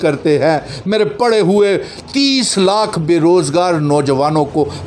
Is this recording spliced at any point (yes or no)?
no